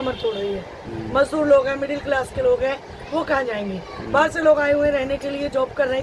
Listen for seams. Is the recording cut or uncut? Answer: uncut